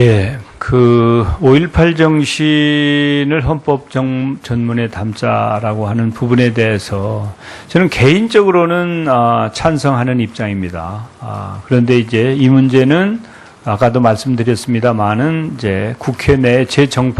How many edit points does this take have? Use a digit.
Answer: 0